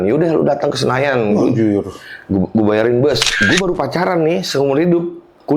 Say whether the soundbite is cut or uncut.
cut